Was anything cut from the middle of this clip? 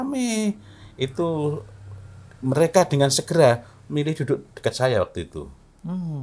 no; 0 cuts

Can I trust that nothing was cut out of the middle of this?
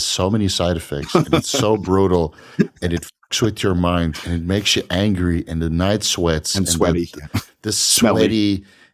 yes; 0 cuts

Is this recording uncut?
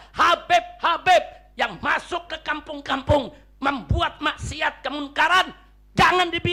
yes; 0 cuts

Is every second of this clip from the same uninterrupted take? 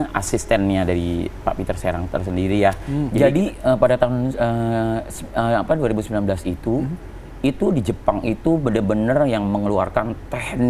no; 1 cut; at 3.1 s

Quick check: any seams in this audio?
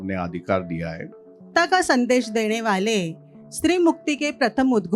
yes; 1 cut; at 1.5 s

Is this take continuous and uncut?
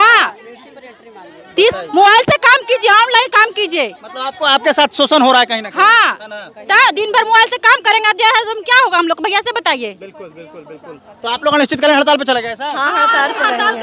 yes; 0 cuts

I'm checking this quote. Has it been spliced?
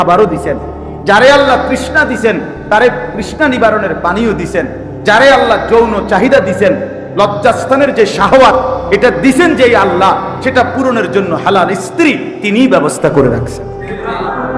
no; 0 cuts

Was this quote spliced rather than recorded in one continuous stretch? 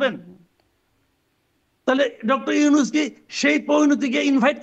no; 0 cuts

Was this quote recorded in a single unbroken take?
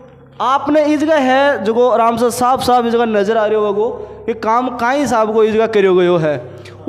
yes; 0 cuts

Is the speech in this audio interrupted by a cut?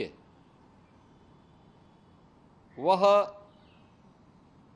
no; 0 cuts

